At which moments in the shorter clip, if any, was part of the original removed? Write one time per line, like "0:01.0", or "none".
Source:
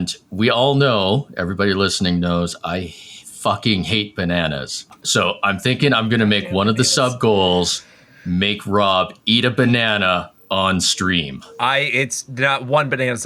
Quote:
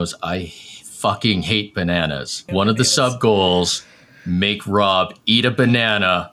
0:02.5